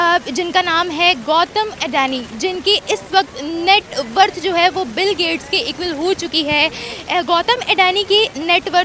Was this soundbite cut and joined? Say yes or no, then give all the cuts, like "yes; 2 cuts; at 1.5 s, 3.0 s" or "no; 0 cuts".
no; 0 cuts